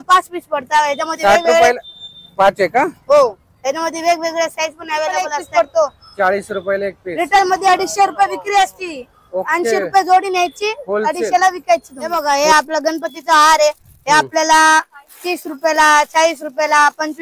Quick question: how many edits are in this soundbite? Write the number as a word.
two